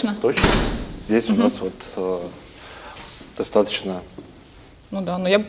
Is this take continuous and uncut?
no; 1 cut; at 1.0 s

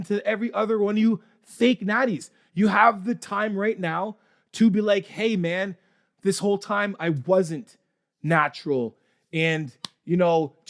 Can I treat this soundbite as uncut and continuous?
yes; 0 cuts

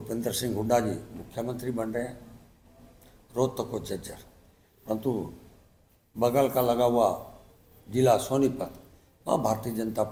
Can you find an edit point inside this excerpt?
no; 0 cuts

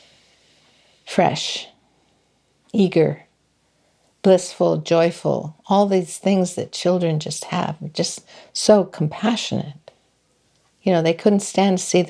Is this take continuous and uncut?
yes; 0 cuts

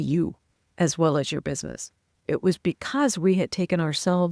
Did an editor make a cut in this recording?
yes; 1 cut; at 2.2 s

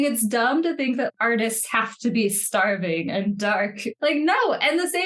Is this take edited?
yes; 2 cuts; at 1.1 s, 3.9 s

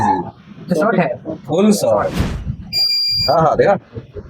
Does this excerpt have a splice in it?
yes; 1 cut; at 2.3 s

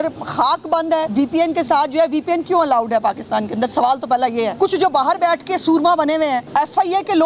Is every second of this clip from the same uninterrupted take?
no; 3 cuts; at 1.1 s, 4.5 s, 6.5 s

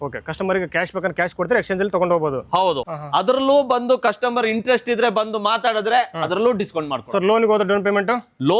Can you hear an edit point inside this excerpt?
yes; 1 cut; at 2.8 s

